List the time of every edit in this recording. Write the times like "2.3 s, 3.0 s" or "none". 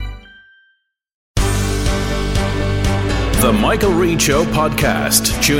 1.2 s